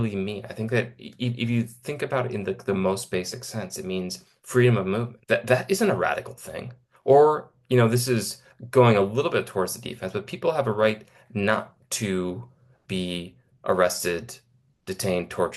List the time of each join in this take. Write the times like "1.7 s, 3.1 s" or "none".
5.1 s